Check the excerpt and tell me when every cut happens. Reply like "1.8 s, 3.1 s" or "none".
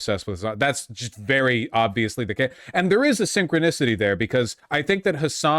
4.6 s